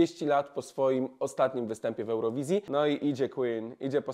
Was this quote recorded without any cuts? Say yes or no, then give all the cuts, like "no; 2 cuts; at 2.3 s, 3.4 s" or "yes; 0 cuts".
no; 1 cut; at 2.7 s